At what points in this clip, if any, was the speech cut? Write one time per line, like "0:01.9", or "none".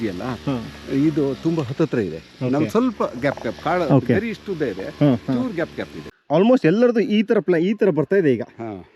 0:06.1